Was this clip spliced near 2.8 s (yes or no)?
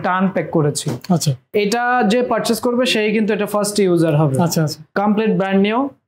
no